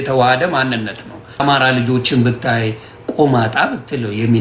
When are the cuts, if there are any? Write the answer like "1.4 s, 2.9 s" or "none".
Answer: 1.4 s

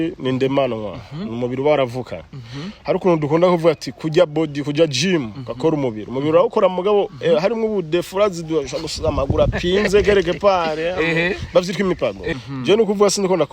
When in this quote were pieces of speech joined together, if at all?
12.3 s

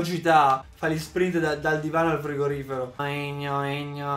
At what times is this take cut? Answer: 3.0 s

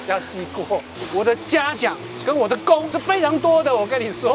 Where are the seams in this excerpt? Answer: 1.0 s, 2.9 s

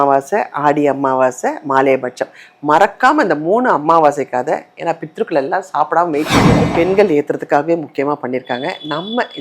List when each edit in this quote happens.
6.6 s

